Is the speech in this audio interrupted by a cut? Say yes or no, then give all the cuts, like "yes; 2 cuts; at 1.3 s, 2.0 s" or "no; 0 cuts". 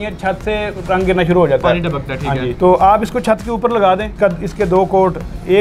yes; 2 cuts; at 2.5 s, 4.1 s